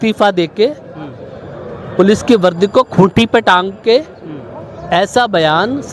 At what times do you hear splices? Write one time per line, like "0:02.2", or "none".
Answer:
none